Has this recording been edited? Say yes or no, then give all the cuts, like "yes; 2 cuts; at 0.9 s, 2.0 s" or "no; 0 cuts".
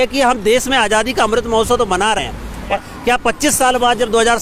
no; 0 cuts